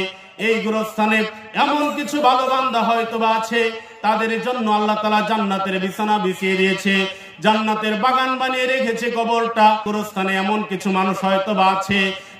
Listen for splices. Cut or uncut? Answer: cut